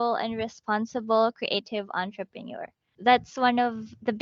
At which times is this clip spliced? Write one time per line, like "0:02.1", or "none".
0:02.9